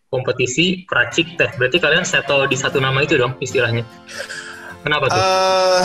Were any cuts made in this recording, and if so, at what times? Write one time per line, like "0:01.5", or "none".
none